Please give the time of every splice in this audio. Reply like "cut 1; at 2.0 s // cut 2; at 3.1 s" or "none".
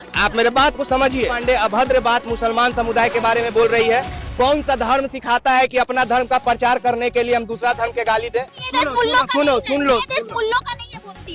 cut 1; at 1.4 s // cut 2; at 8.6 s